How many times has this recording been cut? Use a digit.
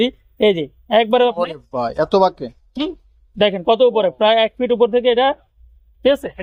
0